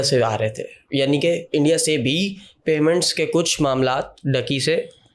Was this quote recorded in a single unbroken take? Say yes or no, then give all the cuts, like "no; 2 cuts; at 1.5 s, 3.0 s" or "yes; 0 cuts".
yes; 0 cuts